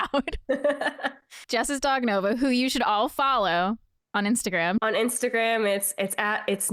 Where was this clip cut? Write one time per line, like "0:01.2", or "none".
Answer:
0:01.3
0:04.8